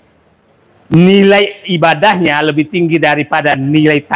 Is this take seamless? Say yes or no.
yes